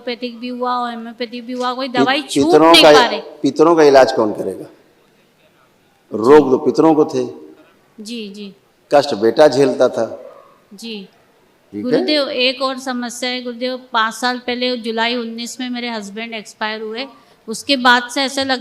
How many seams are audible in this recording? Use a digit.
1